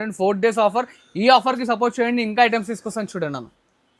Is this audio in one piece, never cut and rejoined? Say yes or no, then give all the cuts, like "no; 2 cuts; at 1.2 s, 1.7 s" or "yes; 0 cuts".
yes; 0 cuts